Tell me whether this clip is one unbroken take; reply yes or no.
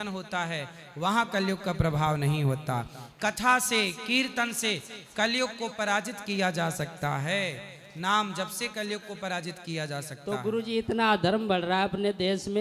yes